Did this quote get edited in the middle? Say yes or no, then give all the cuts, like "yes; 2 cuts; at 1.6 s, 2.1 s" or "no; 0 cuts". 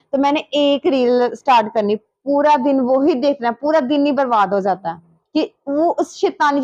no; 0 cuts